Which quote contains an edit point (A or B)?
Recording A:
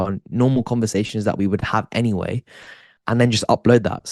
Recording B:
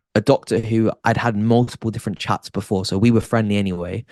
A